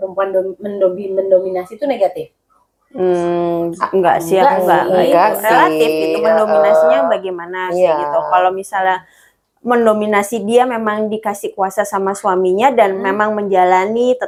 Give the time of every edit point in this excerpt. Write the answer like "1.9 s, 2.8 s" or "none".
none